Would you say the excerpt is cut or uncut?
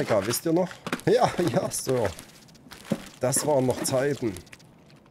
uncut